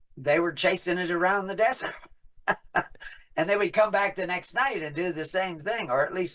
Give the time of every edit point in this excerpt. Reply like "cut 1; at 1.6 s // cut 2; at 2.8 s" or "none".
none